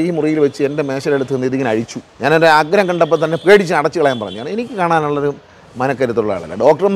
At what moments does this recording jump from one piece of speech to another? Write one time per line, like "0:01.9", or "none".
0:02.0